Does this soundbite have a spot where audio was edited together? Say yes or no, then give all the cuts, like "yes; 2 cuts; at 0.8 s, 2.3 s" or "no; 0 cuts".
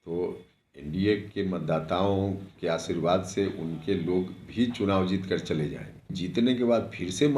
yes; 1 cut; at 6.1 s